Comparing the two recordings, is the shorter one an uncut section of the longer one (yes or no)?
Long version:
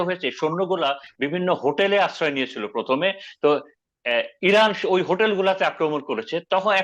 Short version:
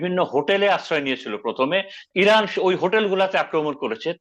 no